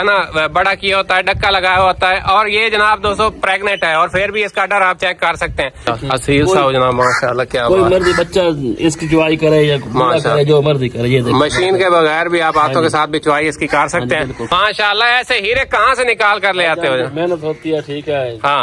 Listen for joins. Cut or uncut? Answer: cut